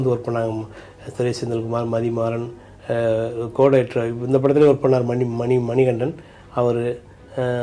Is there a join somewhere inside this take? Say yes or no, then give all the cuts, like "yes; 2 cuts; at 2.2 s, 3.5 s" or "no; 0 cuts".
no; 0 cuts